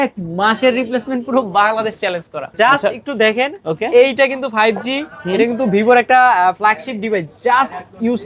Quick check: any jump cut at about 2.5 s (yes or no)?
yes